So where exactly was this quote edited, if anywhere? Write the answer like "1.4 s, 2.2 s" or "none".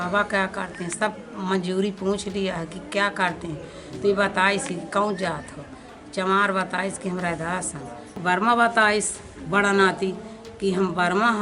8.2 s